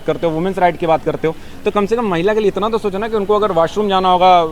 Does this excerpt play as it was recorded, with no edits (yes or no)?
yes